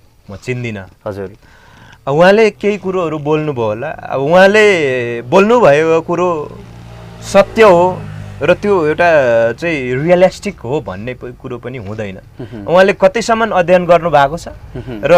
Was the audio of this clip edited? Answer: no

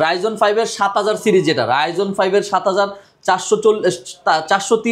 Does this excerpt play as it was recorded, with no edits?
yes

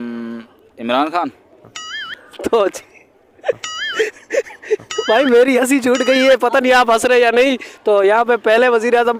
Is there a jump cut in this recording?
no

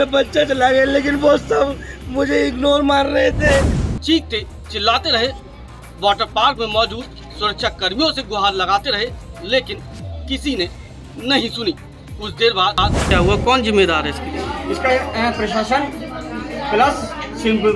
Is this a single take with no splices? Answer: no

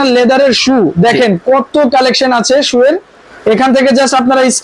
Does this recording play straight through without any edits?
yes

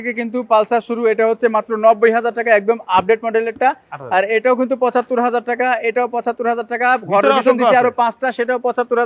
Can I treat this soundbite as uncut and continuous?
yes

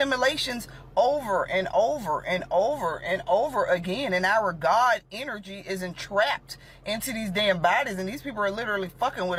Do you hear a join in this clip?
no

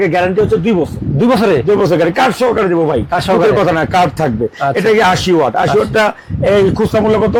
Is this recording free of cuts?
yes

